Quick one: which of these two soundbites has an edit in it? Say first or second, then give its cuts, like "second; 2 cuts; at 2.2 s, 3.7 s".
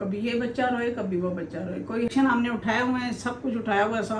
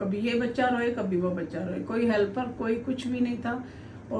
first; 1 cut; at 2.1 s